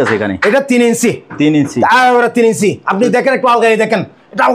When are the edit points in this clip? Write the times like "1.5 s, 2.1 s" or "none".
none